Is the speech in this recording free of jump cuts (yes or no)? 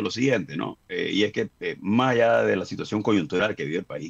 yes